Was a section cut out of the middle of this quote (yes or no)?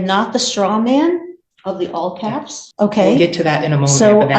yes